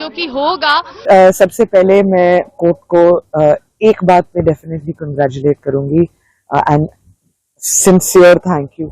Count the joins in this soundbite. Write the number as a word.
one